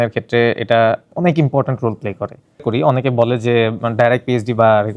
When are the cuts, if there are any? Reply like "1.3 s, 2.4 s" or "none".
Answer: 2.6 s